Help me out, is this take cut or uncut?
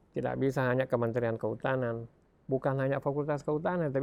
uncut